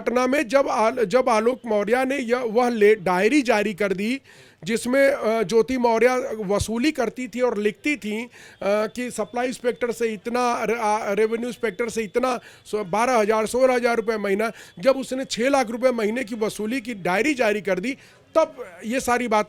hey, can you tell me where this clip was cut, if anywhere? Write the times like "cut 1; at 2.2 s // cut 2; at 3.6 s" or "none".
none